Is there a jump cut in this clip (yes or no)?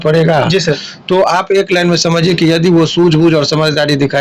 no